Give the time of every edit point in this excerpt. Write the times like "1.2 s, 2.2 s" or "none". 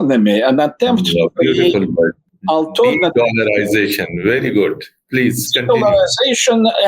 none